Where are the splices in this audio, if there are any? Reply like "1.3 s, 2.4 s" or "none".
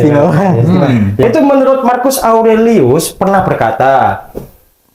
1.2 s